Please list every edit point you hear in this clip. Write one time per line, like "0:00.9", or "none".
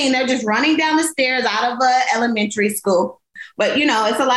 0:03.4